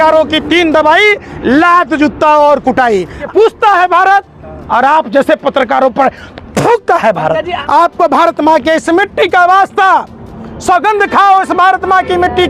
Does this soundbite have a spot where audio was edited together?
yes; 2 cuts; at 3.3 s, 7.6 s

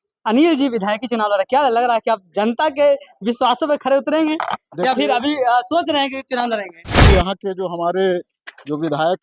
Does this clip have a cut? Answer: yes; 1 cut; at 6.9 s

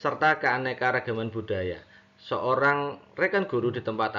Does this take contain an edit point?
no; 0 cuts

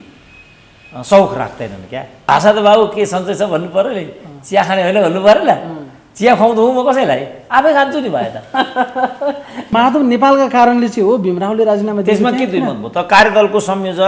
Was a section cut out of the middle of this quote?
yes; 2 cuts; at 2.2 s, 9.7 s

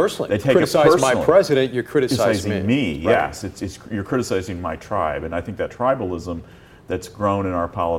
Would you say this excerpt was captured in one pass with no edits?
yes; 0 cuts

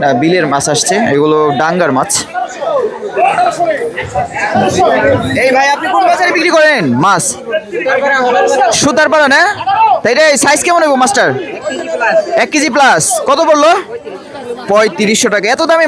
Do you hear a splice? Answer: no; 0 cuts

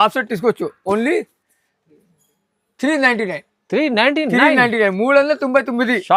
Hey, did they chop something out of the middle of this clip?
no; 0 cuts

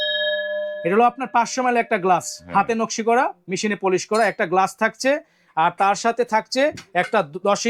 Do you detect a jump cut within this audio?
no; 0 cuts

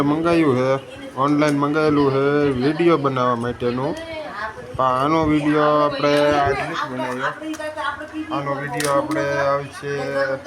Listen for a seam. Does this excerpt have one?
no; 0 cuts

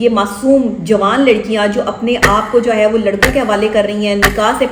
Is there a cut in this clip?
no; 0 cuts

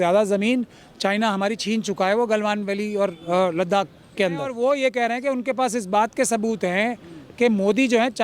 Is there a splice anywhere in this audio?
yes; 1 cut; at 4.5 s

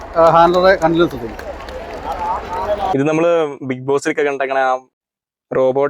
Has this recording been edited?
yes; 1 cut; at 2.9 s

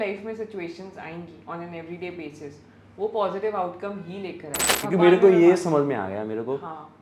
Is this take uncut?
no; 1 cut; at 4.8 s

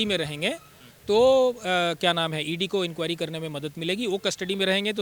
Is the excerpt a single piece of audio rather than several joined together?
yes; 0 cuts

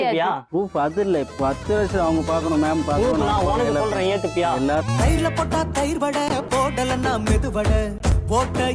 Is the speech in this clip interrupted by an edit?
no; 0 cuts

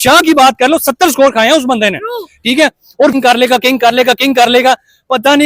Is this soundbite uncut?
no; 1 cut; at 3.1 s

